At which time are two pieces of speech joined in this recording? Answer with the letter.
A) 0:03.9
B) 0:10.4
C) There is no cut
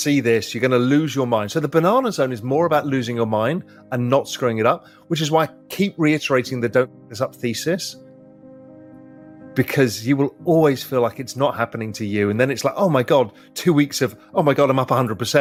C